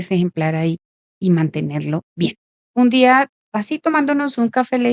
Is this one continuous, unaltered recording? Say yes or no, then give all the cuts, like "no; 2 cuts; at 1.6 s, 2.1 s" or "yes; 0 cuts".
no; 1 cut; at 2.6 s